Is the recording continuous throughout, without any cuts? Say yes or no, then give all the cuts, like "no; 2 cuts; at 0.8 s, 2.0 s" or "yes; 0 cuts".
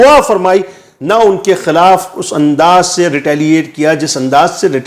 yes; 0 cuts